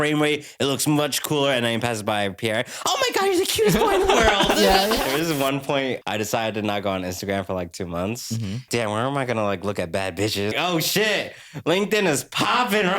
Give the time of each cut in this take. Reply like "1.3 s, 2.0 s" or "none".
5.0 s, 6.0 s, 8.7 s, 10.6 s